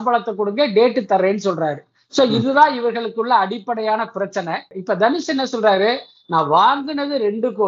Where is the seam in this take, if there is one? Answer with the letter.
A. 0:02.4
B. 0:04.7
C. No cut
B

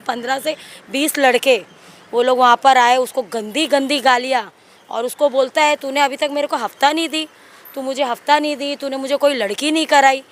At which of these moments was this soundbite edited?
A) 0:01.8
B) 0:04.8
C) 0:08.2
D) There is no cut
D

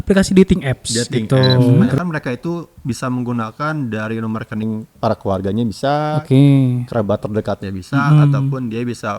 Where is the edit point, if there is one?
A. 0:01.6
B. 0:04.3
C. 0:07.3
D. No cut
A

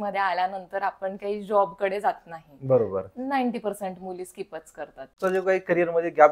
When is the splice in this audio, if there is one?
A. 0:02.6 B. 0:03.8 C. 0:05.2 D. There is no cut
C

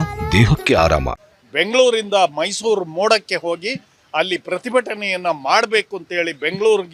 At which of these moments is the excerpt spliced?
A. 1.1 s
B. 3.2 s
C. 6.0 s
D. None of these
D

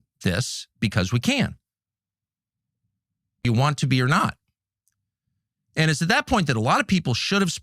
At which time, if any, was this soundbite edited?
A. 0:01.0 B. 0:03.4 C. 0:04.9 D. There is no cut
B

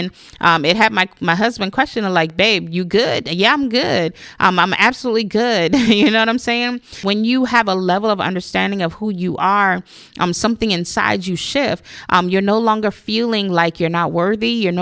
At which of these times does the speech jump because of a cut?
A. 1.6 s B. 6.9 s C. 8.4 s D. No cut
B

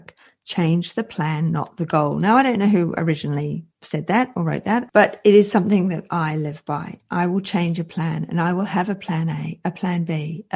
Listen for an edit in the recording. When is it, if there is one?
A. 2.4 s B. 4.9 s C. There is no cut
B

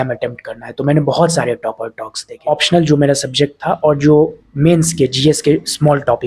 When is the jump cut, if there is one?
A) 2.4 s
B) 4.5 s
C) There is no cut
A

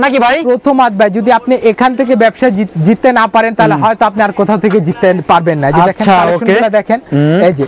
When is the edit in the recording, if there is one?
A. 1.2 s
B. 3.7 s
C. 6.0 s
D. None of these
D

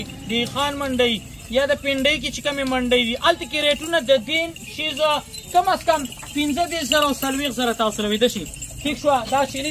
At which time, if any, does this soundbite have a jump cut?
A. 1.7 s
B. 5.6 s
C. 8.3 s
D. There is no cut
D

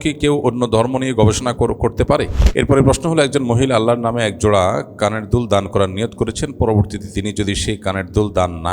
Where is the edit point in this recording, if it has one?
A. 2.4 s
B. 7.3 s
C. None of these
A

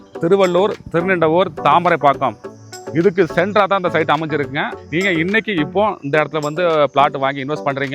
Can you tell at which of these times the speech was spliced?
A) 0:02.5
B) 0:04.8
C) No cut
B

